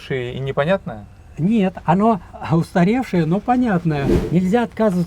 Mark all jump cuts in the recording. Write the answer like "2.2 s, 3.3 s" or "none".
2.3 s, 4.2 s